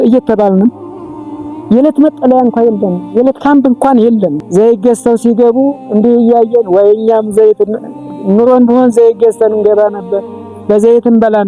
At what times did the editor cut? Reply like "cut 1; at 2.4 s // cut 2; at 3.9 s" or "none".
cut 1; at 4.4 s